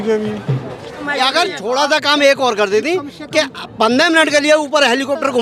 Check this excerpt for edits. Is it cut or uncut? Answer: cut